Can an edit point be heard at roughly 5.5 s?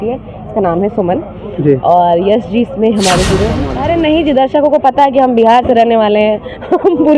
no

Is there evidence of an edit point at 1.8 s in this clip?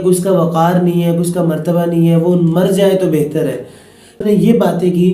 no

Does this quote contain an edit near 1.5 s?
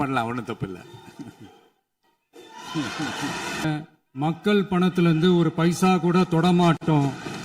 no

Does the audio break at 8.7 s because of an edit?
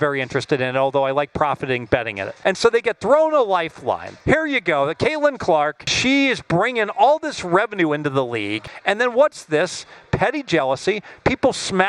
yes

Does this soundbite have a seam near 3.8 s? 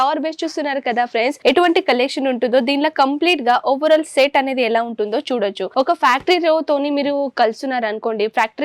no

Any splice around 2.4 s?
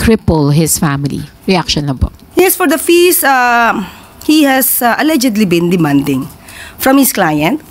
no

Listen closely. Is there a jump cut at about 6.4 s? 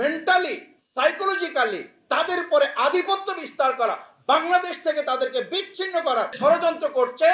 yes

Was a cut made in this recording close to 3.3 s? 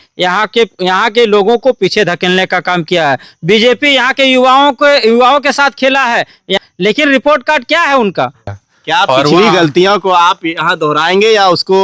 no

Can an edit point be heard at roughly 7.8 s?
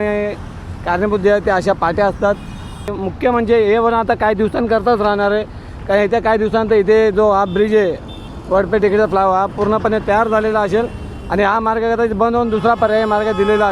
no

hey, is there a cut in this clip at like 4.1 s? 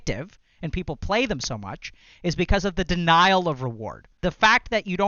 yes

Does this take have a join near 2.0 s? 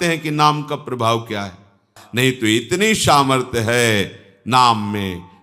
yes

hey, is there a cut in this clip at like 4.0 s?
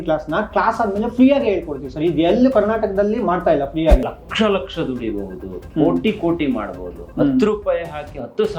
yes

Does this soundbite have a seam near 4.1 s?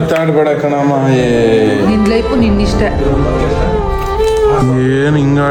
no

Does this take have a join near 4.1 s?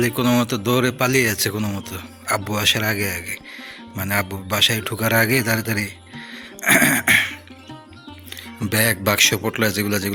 no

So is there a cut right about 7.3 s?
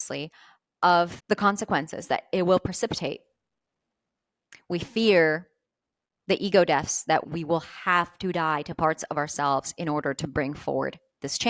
yes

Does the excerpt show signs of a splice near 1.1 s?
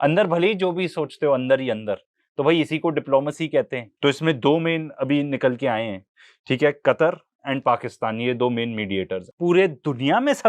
no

